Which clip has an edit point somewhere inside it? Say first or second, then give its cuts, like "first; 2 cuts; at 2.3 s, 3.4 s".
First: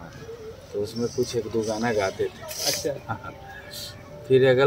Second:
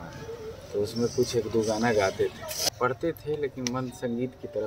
second; 1 cut; at 2.5 s